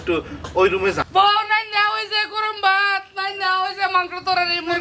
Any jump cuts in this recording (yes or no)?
yes